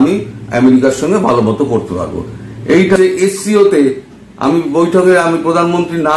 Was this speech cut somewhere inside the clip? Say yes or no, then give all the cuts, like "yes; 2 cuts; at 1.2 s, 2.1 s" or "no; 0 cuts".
yes; 1 cut; at 3.0 s